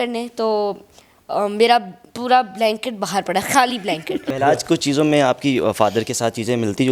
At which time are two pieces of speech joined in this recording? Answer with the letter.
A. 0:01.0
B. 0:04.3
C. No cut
B